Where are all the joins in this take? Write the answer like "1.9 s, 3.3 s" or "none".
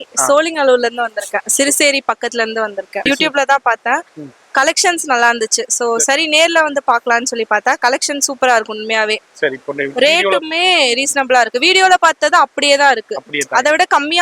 3.0 s

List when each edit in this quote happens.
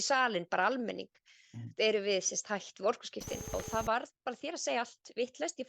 3.5 s

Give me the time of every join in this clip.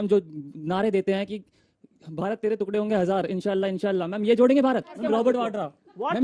5.0 s

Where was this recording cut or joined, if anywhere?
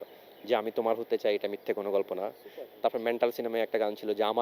none

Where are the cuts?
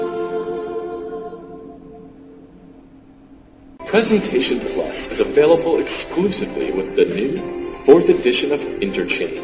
2.9 s

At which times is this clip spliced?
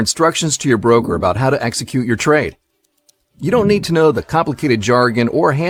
none

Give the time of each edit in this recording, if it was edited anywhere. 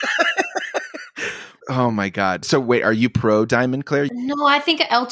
1.5 s, 2.4 s, 4.1 s

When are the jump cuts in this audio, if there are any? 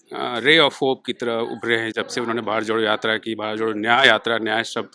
none

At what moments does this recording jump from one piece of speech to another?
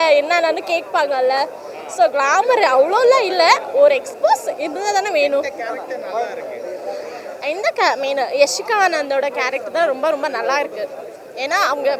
none

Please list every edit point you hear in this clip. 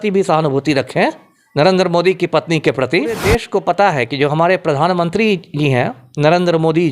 3.2 s

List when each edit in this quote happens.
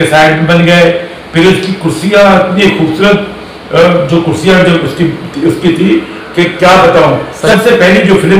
7.4 s

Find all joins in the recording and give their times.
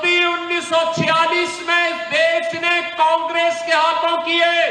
none

